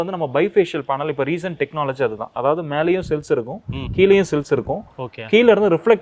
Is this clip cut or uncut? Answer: cut